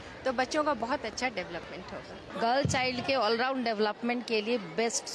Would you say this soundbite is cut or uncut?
cut